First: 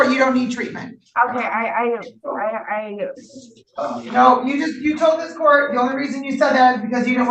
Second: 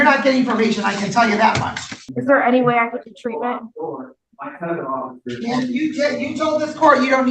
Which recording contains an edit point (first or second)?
second